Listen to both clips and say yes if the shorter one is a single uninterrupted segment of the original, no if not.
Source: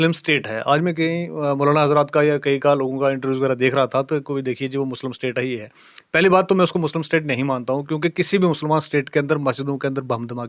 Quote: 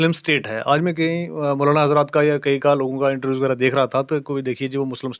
yes